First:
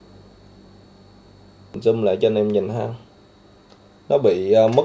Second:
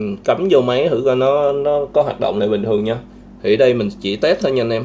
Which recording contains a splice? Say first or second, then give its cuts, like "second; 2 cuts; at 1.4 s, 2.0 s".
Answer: first; 1 cut; at 1.8 s